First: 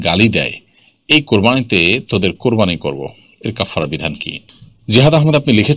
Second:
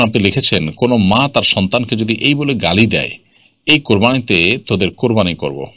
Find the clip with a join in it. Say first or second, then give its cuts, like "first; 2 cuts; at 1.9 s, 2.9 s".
first; 1 cut; at 4.3 s